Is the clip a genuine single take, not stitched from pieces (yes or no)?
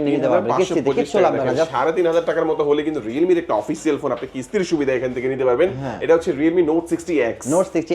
yes